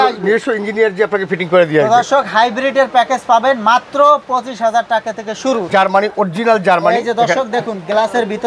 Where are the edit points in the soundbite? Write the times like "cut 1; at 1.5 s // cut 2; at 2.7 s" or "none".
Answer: cut 1; at 5.6 s